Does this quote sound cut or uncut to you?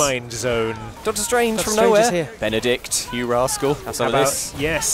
cut